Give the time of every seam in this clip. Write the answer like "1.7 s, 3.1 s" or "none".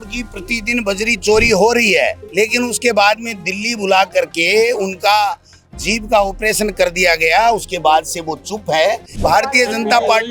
2.2 s, 9.3 s